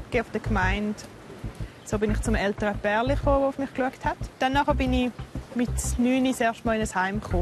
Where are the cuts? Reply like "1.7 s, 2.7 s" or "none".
1.6 s, 4.3 s